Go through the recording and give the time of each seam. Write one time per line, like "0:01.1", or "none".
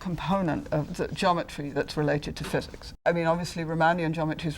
0:00.9
0:02.8

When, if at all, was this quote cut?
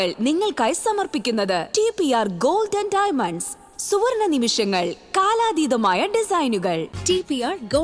none

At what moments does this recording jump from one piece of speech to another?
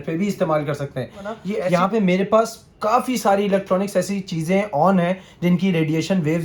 0:01.5

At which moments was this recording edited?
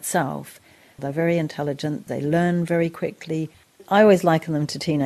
0:01.0
0:02.0
0:03.8

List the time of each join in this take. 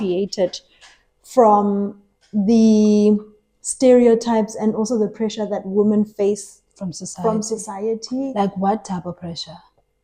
none

